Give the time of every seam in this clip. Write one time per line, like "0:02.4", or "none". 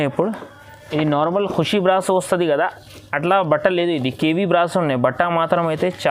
none